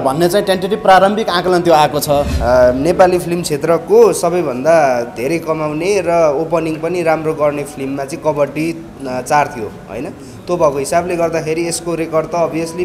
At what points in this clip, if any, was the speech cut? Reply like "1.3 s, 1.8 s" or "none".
2.3 s